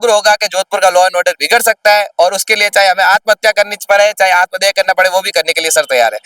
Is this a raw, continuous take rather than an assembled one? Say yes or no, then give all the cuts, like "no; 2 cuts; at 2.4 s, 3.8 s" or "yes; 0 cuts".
yes; 0 cuts